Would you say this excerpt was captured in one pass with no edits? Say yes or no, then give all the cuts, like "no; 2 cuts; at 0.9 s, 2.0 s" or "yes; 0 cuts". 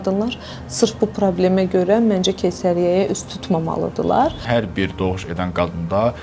no; 1 cut; at 4.4 s